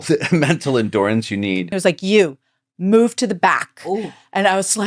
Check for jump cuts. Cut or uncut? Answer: cut